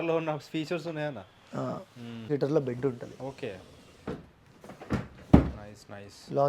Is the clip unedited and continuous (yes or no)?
no